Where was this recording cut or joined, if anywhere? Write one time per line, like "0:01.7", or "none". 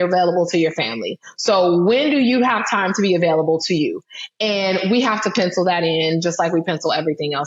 none